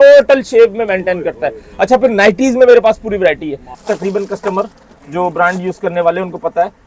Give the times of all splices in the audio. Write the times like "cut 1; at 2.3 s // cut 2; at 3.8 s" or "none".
cut 1; at 3.7 s

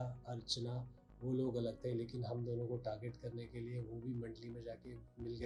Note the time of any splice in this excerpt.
none

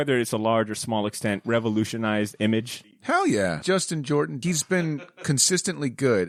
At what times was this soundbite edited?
none

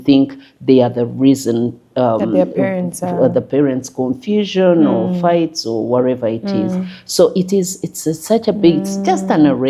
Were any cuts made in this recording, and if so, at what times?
none

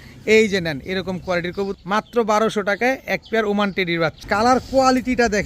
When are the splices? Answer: cut 1; at 1.7 s // cut 2; at 4.2 s

